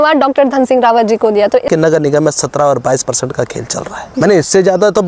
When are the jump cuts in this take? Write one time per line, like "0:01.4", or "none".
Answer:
0:01.7
0:04.0